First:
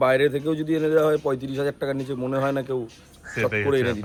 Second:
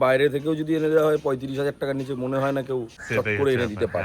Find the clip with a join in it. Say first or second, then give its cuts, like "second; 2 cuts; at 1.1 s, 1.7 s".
second; 1 cut; at 3.0 s